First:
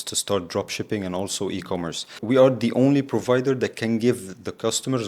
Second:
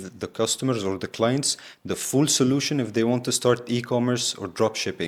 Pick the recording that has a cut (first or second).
first